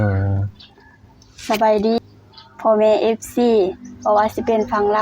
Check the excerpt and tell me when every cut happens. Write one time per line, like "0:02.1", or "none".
0:02.0